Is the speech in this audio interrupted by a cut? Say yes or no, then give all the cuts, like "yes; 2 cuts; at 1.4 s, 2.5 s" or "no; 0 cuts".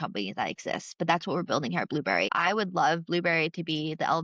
yes; 1 cut; at 2.3 s